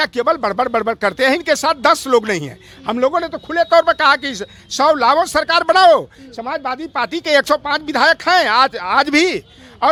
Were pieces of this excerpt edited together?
no; 0 cuts

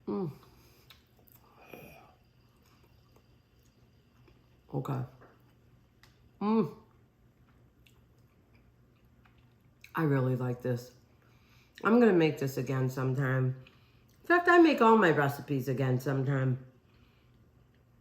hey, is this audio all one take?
yes; 0 cuts

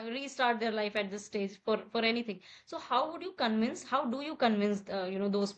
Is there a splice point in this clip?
no; 0 cuts

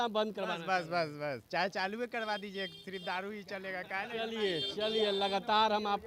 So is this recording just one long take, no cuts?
yes; 0 cuts

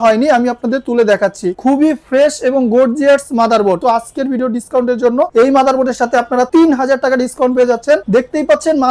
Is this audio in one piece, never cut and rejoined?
no; 2 cuts; at 3.8 s, 8.0 s

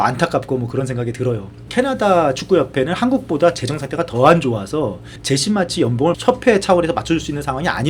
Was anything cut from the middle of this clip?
yes; 3 cuts; at 1.6 s, 5.1 s, 6.2 s

